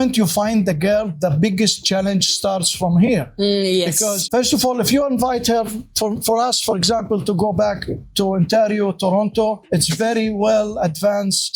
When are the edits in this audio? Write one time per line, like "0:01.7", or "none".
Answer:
none